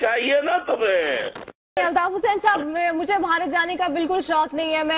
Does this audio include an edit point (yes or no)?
yes